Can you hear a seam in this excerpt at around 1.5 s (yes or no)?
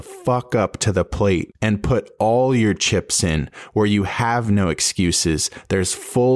yes